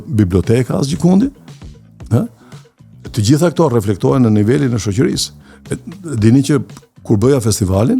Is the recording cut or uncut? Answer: uncut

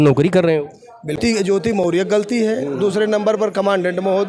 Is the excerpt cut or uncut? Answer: cut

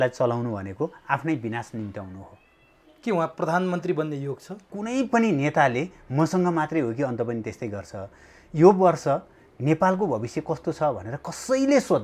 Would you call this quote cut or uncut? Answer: cut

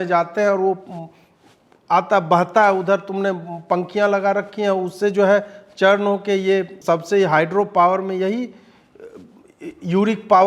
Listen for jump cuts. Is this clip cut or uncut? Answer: cut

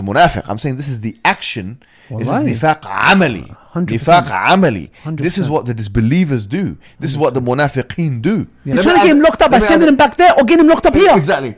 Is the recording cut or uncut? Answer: cut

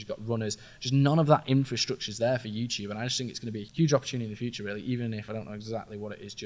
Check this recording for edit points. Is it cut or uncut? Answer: cut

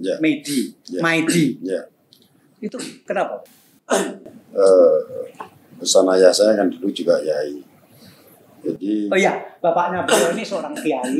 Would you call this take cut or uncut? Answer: uncut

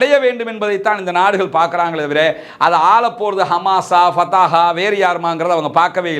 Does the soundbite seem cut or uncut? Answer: uncut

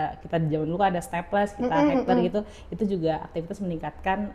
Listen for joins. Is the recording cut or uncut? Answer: uncut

